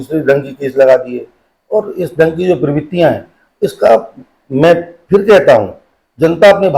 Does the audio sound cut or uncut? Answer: uncut